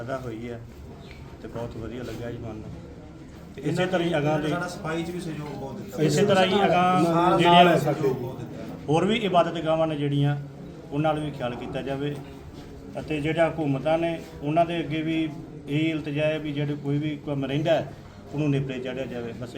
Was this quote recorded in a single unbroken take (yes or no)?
yes